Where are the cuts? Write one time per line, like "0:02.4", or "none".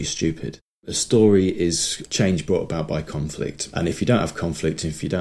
0:00.9
0:03.6